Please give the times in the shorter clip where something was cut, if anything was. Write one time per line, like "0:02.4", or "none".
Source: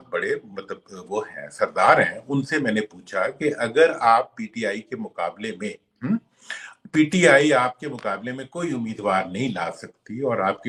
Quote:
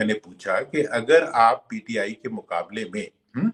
none